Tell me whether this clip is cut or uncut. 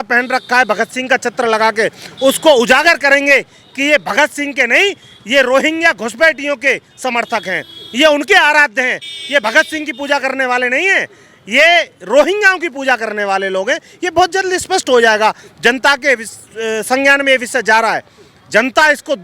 uncut